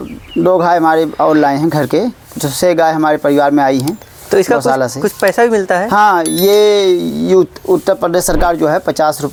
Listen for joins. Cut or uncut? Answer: uncut